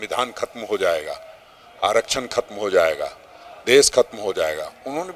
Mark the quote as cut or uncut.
uncut